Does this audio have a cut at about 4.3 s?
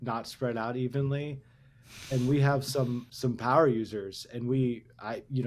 no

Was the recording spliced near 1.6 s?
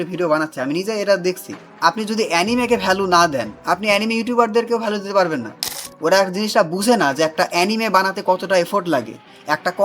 yes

